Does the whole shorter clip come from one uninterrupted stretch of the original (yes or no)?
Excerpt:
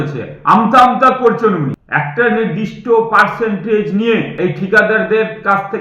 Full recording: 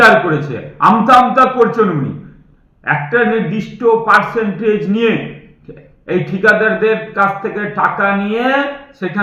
no